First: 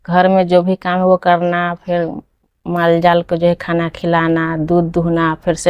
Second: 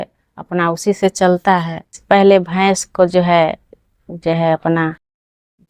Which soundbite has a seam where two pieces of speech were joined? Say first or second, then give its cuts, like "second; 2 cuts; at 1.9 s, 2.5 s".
second; 1 cut; at 1.9 s